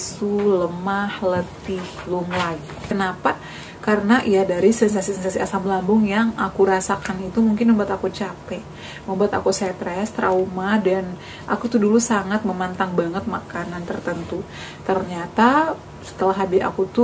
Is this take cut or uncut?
cut